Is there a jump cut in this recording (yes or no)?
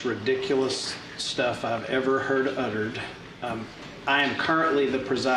no